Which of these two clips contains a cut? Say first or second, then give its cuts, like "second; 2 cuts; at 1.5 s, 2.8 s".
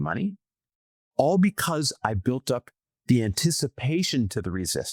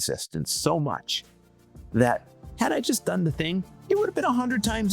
second; 1 cut; at 3.7 s